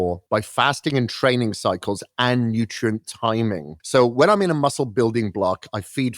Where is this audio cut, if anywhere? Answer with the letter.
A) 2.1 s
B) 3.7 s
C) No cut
B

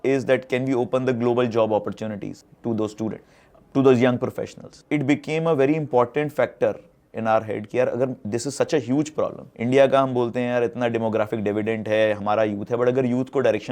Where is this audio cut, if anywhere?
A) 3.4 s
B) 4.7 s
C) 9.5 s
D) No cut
B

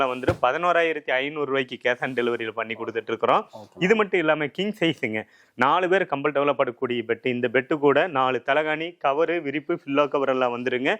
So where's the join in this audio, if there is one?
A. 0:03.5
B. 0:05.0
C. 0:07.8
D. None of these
D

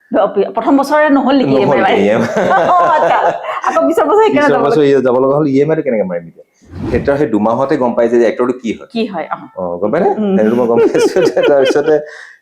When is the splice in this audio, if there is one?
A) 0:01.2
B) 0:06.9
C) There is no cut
B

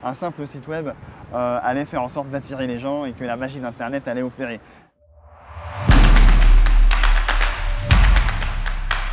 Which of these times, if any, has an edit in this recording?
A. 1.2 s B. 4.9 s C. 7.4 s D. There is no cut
B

